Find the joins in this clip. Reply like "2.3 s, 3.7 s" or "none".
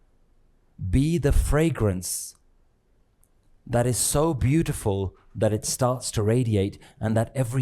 6.1 s